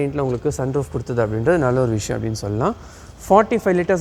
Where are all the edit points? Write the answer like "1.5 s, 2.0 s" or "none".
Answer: none

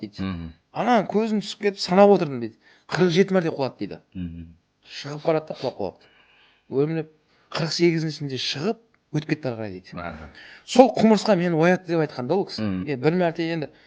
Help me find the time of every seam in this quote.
12.8 s

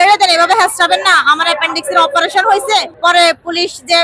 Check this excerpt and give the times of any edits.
2.9 s

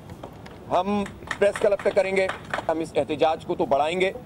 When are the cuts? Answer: 2.4 s

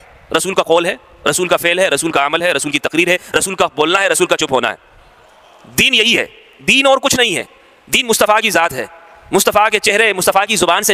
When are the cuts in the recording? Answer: none

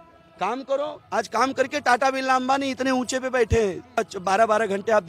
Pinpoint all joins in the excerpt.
4.0 s

